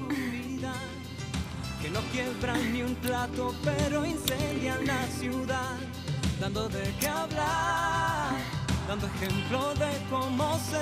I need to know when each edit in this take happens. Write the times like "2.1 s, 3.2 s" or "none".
3.0 s